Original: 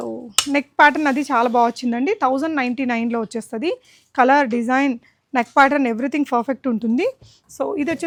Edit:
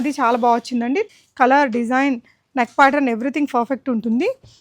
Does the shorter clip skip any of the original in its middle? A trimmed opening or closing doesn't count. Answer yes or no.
yes